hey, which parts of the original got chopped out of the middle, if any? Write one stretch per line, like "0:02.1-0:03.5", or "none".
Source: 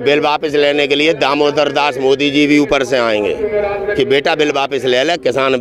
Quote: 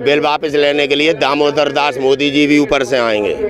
none